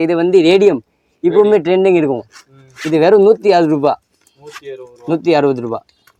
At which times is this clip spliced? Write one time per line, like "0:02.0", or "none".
none